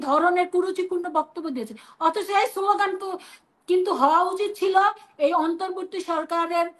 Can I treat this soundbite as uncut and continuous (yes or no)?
yes